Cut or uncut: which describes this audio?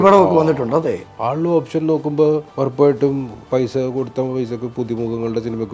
cut